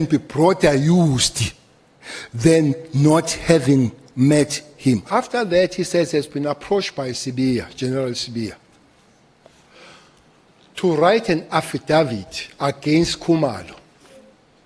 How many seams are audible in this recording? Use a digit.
1